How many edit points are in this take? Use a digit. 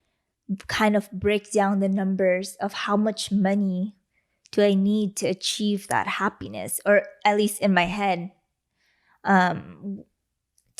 0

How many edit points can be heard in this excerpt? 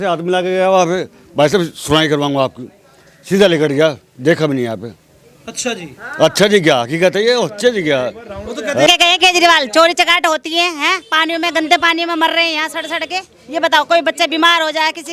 1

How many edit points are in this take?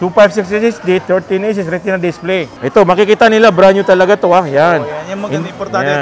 1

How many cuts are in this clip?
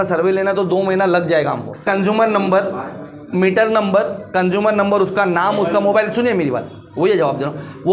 1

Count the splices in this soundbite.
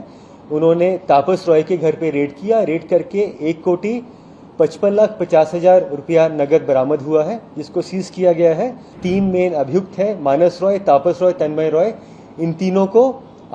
1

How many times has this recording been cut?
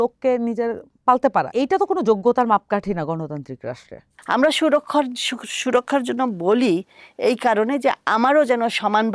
2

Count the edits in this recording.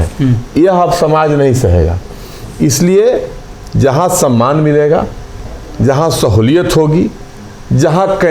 0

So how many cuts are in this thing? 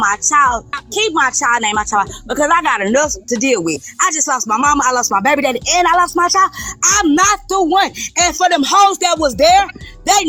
0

